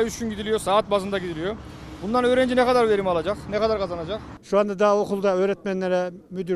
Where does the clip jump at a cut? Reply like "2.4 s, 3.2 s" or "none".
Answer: 4.3 s